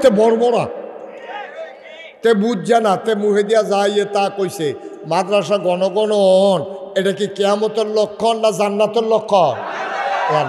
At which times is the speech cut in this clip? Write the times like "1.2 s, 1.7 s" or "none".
none